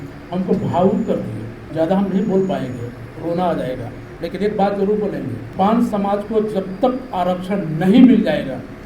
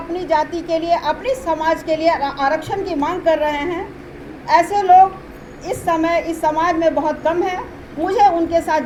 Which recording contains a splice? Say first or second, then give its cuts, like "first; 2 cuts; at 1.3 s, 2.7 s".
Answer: first; 3 cuts; at 1.6 s, 4.0 s, 5.4 s